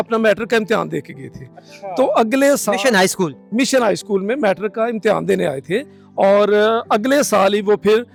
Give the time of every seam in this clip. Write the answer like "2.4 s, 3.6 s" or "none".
none